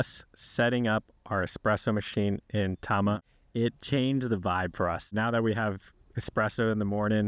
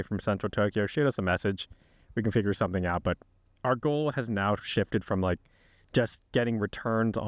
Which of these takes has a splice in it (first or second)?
first